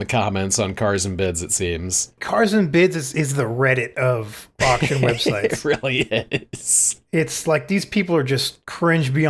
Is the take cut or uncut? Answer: cut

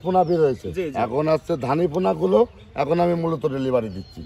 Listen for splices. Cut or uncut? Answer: uncut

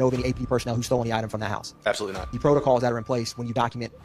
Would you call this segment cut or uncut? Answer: cut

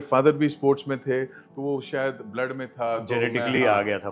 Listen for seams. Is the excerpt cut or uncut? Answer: uncut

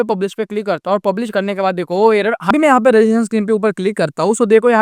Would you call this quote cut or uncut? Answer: cut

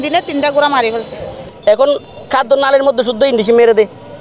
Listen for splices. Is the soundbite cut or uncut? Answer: cut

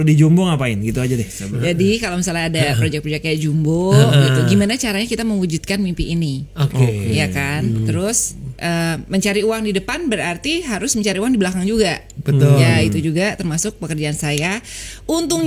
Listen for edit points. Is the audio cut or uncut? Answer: cut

